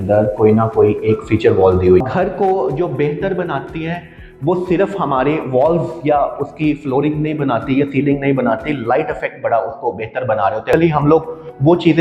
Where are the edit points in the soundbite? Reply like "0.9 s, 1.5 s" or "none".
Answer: 2.0 s, 10.7 s